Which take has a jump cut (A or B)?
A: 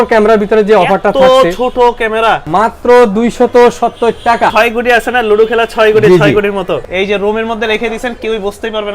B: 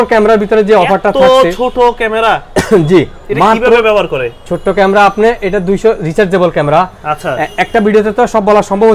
A